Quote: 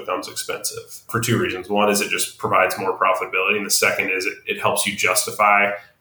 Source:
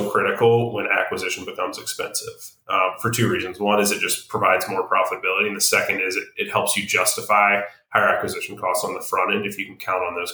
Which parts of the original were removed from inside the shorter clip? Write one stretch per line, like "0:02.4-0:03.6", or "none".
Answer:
0:02.6-0:03.0